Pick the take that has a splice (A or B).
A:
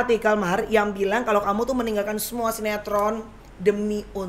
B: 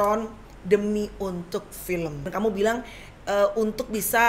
B